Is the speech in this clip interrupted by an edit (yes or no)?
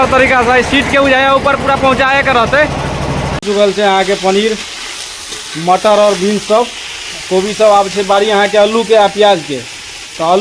yes